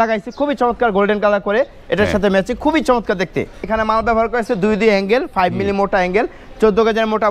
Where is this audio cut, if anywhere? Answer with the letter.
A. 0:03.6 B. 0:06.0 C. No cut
A